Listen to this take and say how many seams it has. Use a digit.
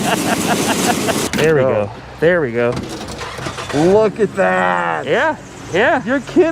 1